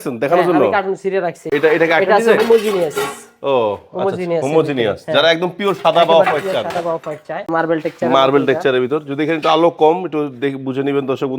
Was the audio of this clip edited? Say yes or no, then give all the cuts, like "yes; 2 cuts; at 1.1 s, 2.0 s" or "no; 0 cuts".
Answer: yes; 2 cuts; at 1.4 s, 7.5 s